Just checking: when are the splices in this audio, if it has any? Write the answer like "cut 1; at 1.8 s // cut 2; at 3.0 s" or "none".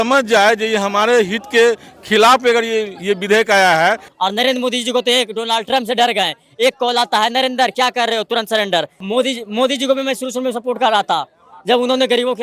cut 1; at 4.1 s // cut 2; at 9.0 s